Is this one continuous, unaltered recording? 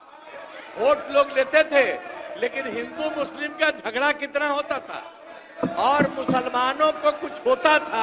yes; 0 cuts

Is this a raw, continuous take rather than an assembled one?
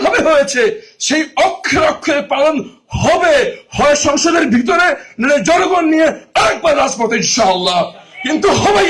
yes; 0 cuts

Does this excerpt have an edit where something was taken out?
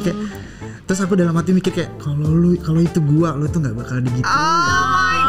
no; 0 cuts

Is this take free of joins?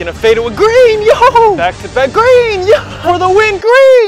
no; 1 cut; at 3.1 s

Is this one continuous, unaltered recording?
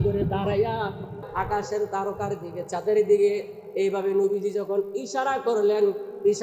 no; 1 cut; at 1.1 s

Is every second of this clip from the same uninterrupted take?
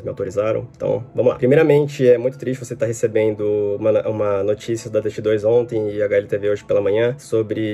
yes; 0 cuts

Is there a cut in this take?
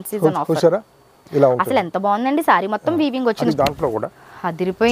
yes; 1 cut; at 3.5 s

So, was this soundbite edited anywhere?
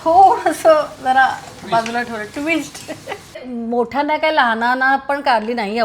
yes; 1 cut; at 3.5 s

